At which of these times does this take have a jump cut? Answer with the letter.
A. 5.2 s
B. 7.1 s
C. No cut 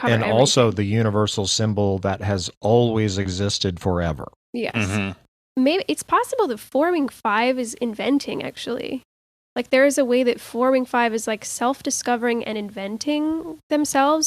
A